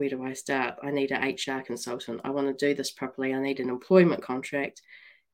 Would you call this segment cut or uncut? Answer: uncut